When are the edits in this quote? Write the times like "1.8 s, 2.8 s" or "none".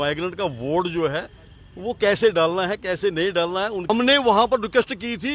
3.8 s